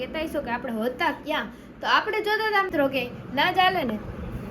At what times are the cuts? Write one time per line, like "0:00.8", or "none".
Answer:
0:02.7